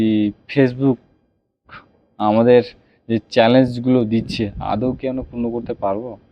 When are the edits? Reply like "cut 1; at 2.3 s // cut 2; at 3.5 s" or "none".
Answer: none

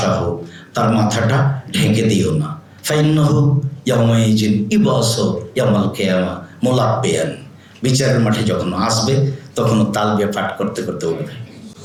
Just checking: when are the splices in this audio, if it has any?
none

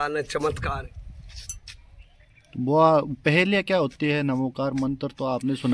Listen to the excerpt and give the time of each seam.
none

